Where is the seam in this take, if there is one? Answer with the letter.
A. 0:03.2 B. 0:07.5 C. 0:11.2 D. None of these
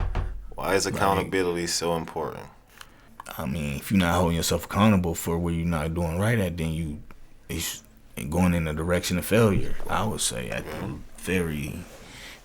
A